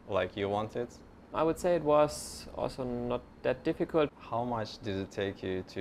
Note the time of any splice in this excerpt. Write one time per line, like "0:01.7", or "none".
0:01.3
0:04.1